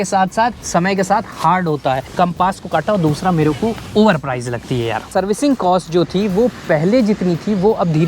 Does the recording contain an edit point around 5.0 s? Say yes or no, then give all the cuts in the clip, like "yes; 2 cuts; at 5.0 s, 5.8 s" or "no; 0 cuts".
yes; 2 cuts; at 2.1 s, 5.0 s